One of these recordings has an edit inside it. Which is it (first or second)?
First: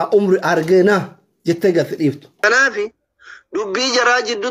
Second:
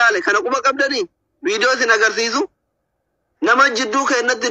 first